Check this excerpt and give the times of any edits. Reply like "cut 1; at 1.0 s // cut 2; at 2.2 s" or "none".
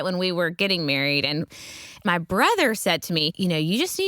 cut 1; at 1.5 s // cut 2; at 3.3 s